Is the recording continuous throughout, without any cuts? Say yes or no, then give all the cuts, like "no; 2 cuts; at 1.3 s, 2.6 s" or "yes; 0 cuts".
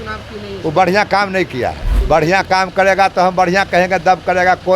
no; 1 cut; at 1.9 s